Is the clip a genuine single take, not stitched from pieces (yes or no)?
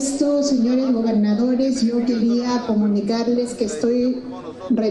yes